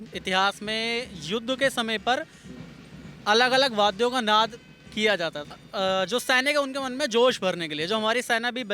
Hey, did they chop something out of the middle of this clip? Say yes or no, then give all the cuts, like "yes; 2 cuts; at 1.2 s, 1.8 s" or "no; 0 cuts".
yes; 1 cut; at 5.4 s